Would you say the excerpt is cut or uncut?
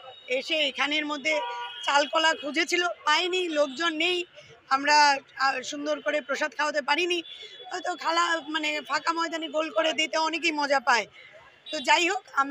uncut